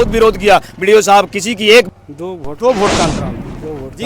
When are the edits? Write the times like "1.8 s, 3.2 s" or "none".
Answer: 1.9 s